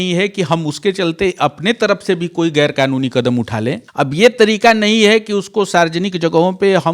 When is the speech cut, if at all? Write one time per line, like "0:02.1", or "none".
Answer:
0:03.8